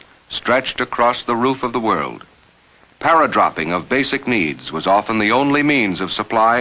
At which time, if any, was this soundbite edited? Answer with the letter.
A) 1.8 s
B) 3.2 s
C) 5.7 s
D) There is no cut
B